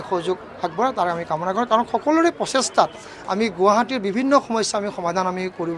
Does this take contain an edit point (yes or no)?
no